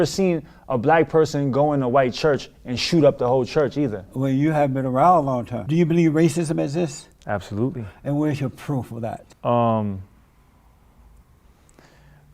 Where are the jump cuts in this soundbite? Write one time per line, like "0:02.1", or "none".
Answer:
0:05.6
0:09.3